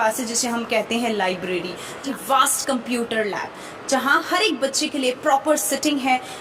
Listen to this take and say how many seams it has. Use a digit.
1